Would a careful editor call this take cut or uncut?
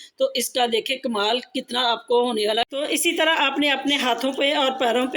cut